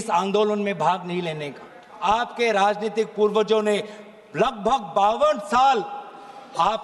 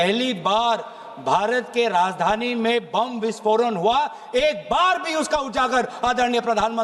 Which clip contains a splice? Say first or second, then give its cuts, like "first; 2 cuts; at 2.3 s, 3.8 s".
first; 1 cut; at 2.0 s